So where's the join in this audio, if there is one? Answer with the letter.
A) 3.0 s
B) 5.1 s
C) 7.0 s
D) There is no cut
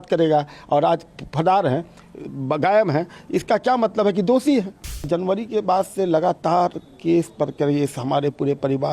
B